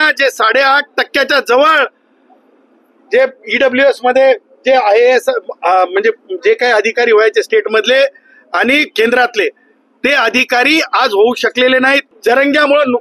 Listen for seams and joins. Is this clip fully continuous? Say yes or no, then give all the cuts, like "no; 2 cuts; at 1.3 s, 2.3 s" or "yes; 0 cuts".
no; 1 cut; at 12.1 s